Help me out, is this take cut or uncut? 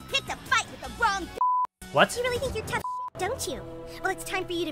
uncut